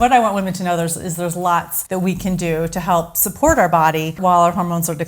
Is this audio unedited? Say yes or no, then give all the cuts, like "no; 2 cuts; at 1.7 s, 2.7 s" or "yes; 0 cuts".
no; 2 cuts; at 1.8 s, 4.2 s